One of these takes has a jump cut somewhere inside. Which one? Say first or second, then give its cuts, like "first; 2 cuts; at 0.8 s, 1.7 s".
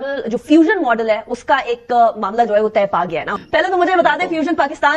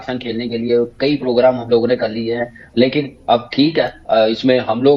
first; 1 cut; at 3.3 s